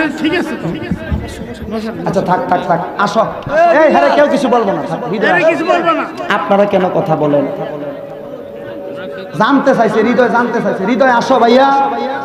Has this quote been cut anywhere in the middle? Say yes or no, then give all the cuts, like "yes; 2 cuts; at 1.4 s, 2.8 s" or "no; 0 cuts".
no; 0 cuts